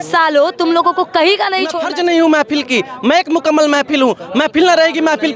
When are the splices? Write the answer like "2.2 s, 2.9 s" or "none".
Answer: 1.8 s

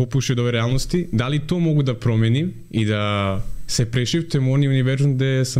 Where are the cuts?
none

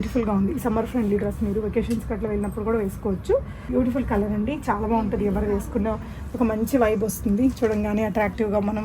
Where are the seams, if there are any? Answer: 3.6 s

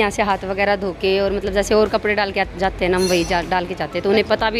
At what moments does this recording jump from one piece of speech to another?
none

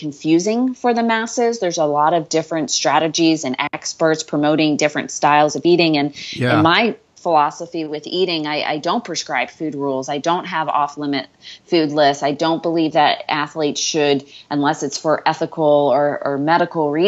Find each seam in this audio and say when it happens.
none

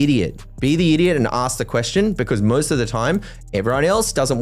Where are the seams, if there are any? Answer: none

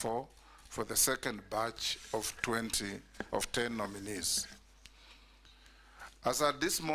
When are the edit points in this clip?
3.1 s

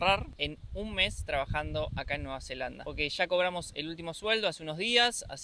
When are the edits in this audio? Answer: none

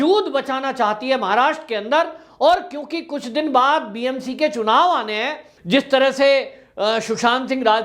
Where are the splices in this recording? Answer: 5.5 s

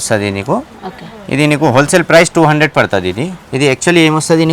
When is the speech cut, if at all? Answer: 3.4 s

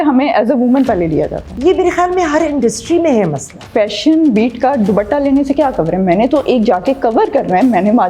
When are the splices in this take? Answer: 1.4 s, 3.5 s

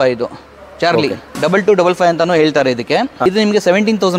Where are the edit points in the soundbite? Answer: 1.3 s, 3.1 s

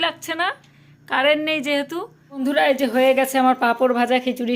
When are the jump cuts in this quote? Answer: 2.2 s

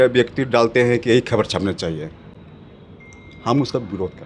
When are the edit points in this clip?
none

